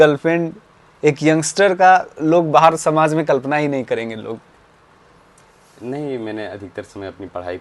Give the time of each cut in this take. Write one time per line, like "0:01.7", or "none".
none